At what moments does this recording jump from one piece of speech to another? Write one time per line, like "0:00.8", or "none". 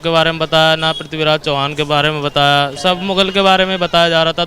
0:02.8